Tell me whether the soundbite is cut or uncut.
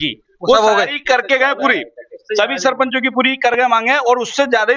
uncut